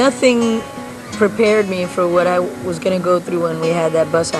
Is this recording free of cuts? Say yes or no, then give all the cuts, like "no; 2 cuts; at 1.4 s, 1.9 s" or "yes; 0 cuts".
yes; 0 cuts